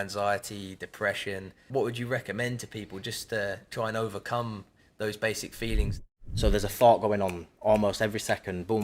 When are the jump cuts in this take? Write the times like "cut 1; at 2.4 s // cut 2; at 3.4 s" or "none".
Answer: cut 1; at 1.6 s // cut 2; at 6.0 s